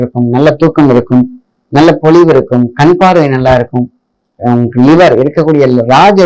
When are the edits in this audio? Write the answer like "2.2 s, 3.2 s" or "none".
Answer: none